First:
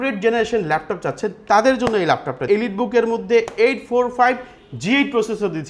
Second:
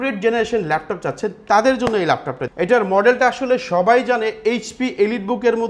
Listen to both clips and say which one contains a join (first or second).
first